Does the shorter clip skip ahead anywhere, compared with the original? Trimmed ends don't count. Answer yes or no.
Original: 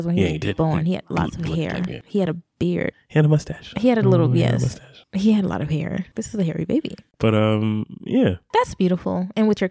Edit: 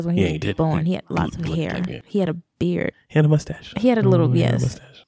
no